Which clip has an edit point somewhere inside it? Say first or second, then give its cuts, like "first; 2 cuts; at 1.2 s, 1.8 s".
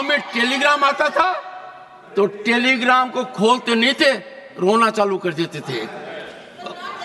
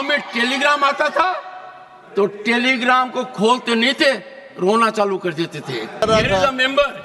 second; 1 cut; at 6.0 s